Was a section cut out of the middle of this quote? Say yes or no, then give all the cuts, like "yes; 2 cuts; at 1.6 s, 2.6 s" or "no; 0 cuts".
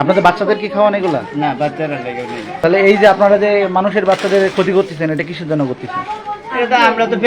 yes; 1 cut; at 2.5 s